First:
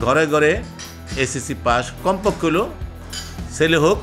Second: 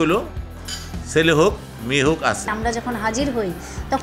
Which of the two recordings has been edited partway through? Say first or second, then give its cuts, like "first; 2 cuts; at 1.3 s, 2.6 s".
second; 1 cut; at 2.5 s